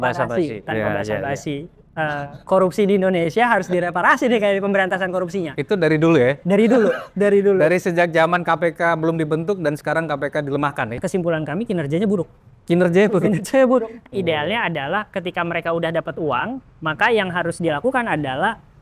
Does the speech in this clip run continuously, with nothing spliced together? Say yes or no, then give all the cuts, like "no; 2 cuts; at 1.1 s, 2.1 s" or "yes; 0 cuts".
no; 2 cuts; at 11.0 s, 14.0 s